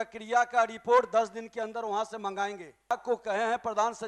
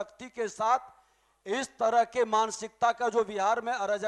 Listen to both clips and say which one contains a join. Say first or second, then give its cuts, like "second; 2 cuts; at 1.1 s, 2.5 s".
first; 1 cut; at 2.9 s